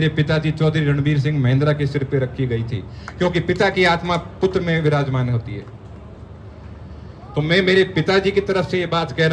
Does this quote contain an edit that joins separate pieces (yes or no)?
no